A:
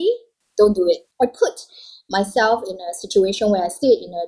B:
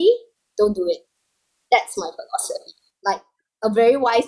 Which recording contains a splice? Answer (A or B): A